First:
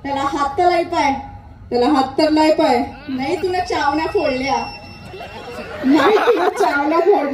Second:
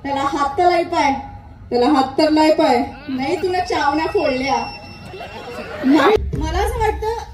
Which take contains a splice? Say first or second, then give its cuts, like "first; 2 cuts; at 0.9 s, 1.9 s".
second; 1 cut; at 6.2 s